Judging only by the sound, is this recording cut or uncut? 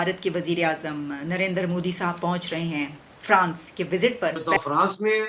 cut